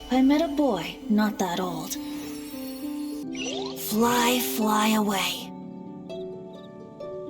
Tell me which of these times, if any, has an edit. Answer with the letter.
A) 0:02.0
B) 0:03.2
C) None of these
B